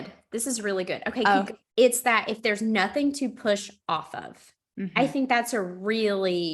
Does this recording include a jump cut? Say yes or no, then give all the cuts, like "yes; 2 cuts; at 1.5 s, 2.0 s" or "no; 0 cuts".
yes; 1 cut; at 1.6 s